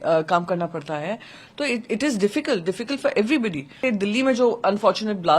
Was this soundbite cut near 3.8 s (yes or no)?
yes